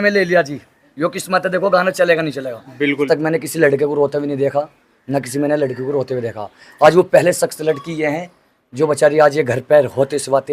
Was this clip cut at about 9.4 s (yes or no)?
no